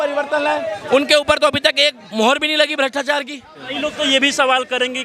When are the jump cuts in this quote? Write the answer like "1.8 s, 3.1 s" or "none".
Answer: 3.7 s